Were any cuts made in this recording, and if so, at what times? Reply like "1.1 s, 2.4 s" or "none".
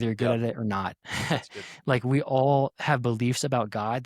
none